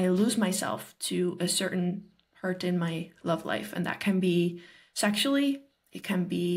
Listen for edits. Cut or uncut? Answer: uncut